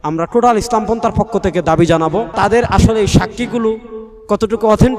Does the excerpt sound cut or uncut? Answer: cut